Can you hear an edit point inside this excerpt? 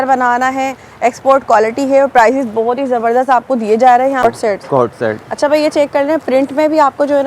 yes; 1 cut; at 4.2 s

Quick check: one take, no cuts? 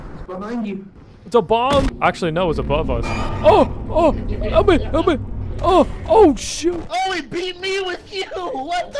no; 1 cut; at 1.9 s

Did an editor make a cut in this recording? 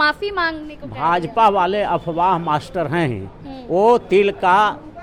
no; 0 cuts

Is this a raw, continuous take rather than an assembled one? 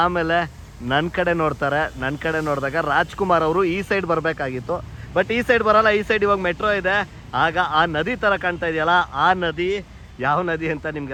yes; 0 cuts

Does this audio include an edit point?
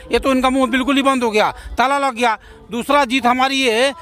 no; 0 cuts

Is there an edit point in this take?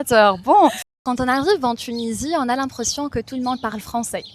yes; 1 cut; at 1.0 s

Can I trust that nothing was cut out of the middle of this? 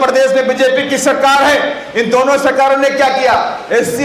yes; 0 cuts

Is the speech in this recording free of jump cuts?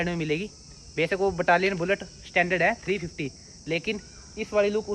yes; 0 cuts

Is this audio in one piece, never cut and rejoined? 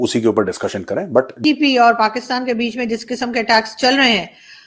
no; 1 cut; at 1.4 s

